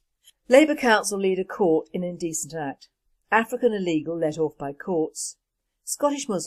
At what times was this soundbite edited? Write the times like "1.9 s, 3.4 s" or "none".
none